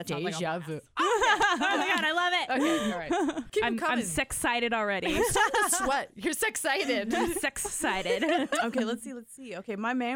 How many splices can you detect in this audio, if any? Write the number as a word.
one